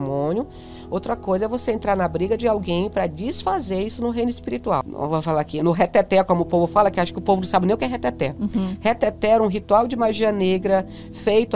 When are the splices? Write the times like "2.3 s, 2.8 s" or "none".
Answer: 4.9 s